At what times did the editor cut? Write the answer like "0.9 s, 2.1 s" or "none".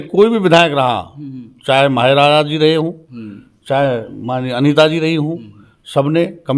none